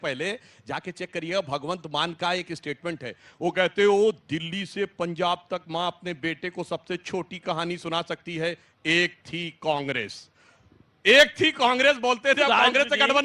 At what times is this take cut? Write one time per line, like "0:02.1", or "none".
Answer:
none